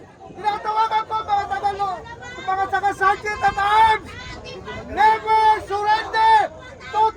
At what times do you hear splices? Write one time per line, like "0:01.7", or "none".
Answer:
none

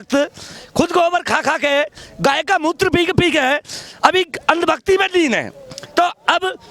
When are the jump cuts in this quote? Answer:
none

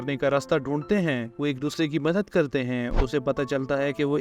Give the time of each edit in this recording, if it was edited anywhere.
0:02.9

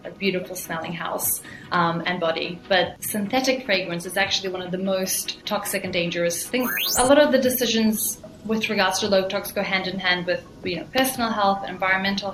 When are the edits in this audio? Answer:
0:03.0
0:05.4
0:06.8

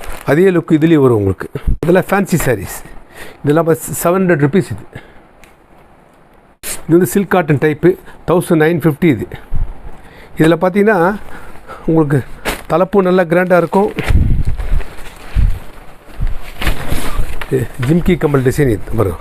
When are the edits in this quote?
0:01.8
0:06.6

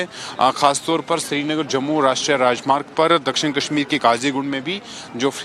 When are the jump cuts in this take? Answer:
0:02.5

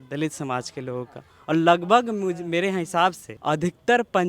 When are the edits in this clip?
0:03.3

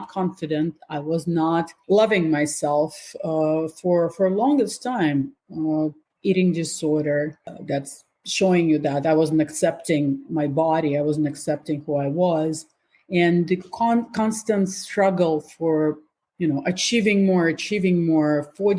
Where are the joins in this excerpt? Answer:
0:01.7

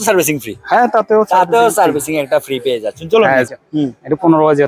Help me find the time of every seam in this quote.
0:03.5

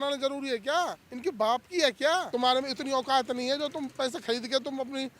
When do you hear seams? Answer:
0:01.0
0:02.3

